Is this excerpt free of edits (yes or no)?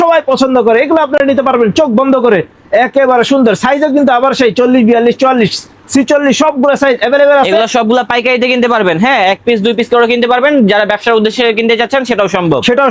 yes